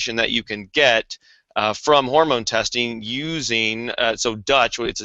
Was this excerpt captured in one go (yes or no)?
yes